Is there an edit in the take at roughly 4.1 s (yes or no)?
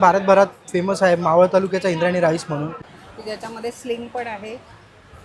no